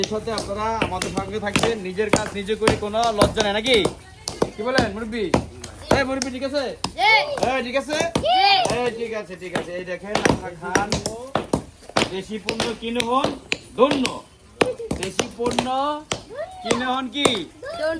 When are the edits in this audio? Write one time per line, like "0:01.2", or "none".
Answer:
none